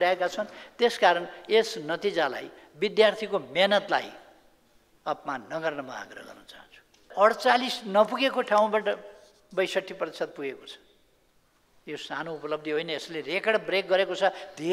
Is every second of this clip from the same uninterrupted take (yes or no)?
no